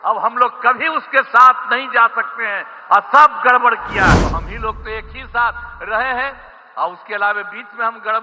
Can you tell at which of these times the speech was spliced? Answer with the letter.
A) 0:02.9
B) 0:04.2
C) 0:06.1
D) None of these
B